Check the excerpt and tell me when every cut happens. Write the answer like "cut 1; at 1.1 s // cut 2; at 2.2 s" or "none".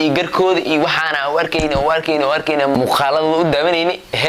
cut 1; at 2.7 s